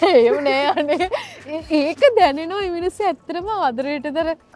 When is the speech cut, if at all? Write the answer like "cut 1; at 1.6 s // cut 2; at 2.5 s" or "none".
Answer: none

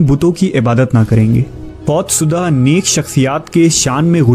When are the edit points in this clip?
cut 1; at 1.8 s

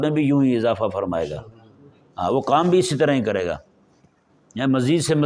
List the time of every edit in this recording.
none

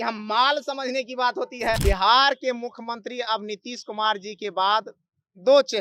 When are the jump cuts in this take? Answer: cut 1; at 1.8 s

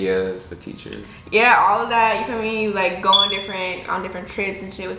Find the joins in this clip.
none

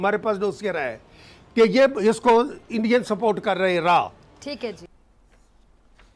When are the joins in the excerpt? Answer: cut 1; at 4.8 s

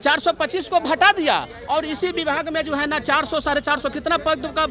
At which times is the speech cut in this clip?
none

